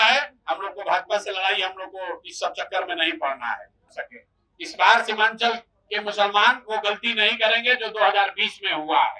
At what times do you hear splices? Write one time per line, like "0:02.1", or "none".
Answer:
0:04.0